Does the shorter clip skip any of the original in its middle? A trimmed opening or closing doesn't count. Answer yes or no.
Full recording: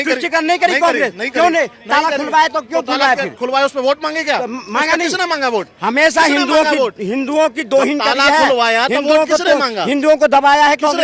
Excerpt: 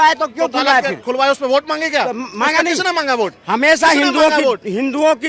no